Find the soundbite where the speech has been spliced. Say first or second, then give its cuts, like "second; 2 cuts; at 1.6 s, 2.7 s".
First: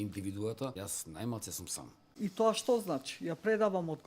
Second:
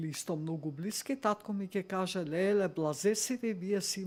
first; 2 cuts; at 0.7 s, 2.1 s